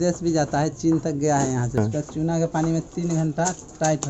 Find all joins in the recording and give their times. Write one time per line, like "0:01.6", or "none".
0:01.7